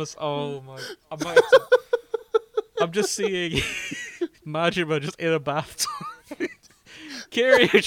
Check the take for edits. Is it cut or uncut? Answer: cut